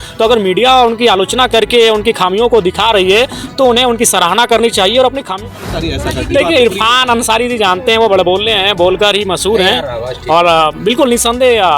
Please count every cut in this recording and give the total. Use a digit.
1